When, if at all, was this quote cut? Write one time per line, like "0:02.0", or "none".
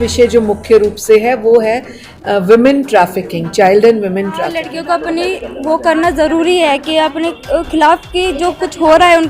0:04.6